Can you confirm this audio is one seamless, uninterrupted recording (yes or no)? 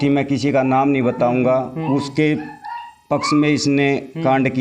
yes